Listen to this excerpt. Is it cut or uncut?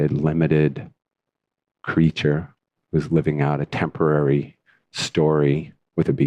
cut